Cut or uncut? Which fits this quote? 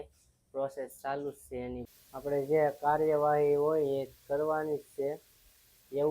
cut